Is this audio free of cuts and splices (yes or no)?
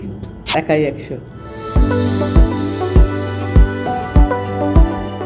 yes